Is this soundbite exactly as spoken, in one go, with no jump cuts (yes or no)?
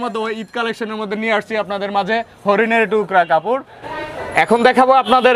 no